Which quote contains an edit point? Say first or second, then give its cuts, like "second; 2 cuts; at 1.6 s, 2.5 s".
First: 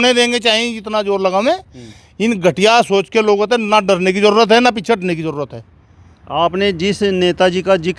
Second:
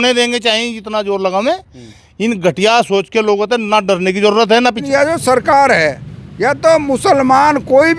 second; 1 cut; at 4.8 s